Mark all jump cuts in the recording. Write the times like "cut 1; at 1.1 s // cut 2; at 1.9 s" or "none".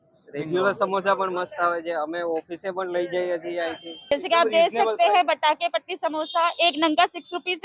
cut 1; at 4.1 s